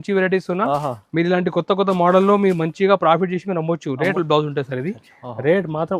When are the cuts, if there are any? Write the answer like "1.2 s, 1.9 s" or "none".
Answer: 4.1 s